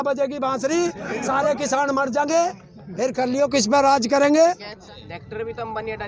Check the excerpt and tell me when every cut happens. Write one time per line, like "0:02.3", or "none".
0:04.8